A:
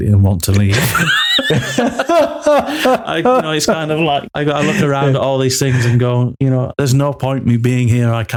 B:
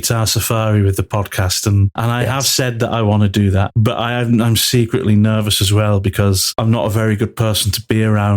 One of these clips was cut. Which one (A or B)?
B